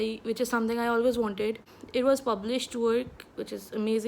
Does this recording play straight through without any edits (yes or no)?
no